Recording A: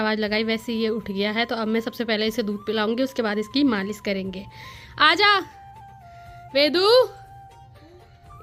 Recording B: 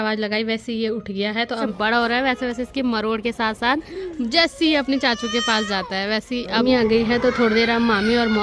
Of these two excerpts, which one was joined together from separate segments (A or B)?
B